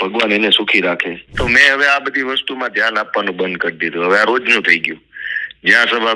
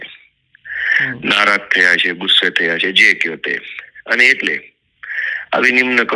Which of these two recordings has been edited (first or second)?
first